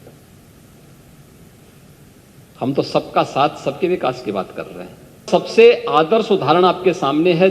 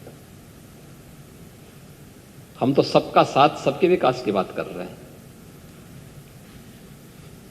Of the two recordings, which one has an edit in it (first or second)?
first